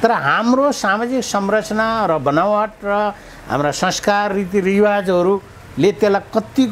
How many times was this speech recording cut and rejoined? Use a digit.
0